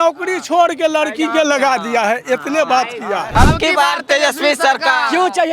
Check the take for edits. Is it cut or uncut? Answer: cut